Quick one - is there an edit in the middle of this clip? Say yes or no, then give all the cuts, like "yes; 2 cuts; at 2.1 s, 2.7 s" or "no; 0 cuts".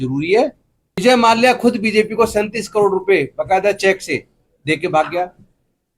yes; 1 cut; at 1.0 s